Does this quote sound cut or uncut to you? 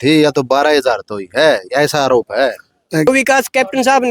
cut